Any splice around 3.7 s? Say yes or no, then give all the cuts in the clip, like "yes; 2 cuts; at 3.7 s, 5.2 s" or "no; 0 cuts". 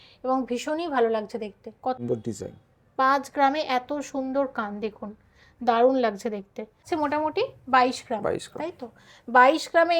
no; 2 cuts; at 2.0 s, 6.8 s